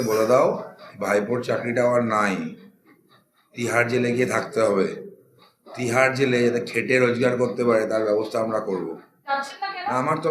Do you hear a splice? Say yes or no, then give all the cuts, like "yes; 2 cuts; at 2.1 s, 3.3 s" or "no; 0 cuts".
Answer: yes; 1 cut; at 9.1 s